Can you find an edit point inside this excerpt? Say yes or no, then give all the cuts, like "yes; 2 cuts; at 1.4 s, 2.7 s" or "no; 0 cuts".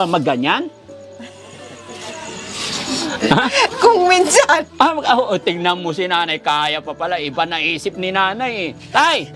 no; 0 cuts